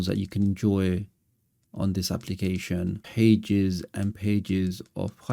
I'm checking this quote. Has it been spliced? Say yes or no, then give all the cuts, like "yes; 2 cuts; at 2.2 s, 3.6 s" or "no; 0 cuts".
yes; 1 cut; at 3.0 s